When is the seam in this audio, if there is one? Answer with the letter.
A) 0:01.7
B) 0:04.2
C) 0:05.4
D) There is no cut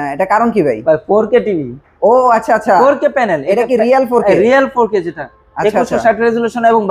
D